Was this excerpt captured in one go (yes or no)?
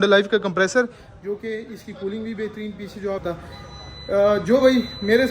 no